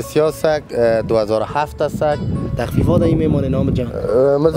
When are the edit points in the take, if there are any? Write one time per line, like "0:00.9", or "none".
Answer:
0:02.4